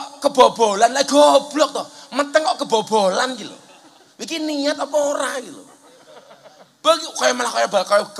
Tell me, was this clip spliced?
no; 0 cuts

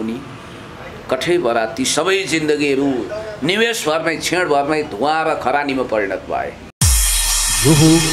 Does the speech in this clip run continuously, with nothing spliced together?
no; 1 cut; at 6.8 s

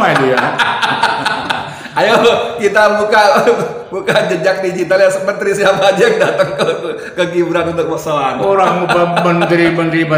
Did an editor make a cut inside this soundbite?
no; 0 cuts

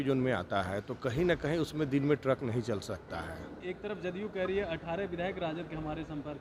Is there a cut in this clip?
yes; 1 cut; at 3.5 s

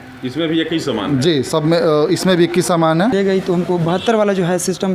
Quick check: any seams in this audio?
yes; 1 cut; at 3.1 s

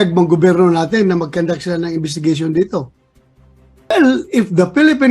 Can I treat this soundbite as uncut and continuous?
no; 1 cut; at 3.9 s

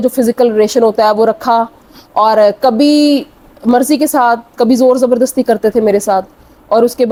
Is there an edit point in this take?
no; 0 cuts

